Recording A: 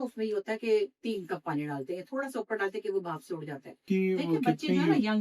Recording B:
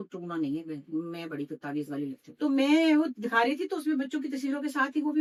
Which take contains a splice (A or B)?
A